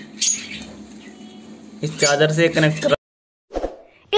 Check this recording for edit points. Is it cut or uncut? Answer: cut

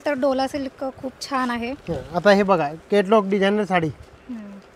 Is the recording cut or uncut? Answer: uncut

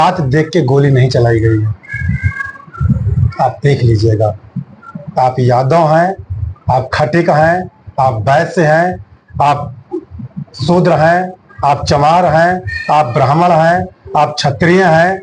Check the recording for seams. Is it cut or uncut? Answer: uncut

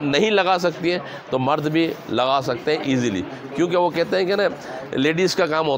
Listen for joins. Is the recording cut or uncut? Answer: uncut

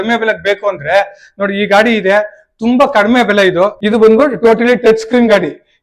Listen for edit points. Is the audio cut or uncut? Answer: cut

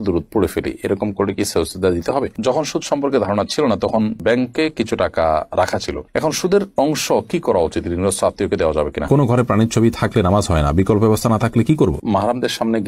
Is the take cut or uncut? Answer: cut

